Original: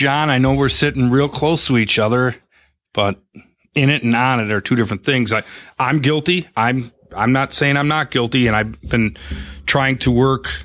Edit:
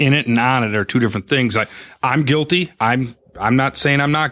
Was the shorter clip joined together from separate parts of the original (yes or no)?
no